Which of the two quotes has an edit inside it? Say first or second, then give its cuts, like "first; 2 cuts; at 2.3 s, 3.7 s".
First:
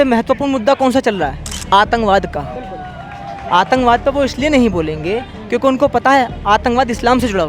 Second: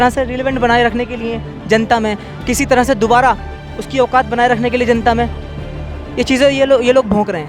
first; 1 cut; at 1.5 s